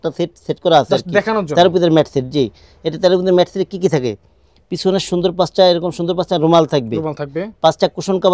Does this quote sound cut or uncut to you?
uncut